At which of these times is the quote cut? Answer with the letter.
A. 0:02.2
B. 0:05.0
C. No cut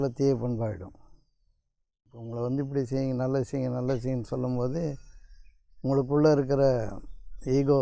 A